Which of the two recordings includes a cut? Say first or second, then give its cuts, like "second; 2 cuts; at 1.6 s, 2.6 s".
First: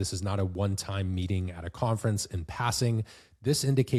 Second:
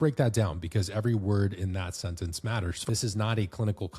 second; 1 cut; at 2.8 s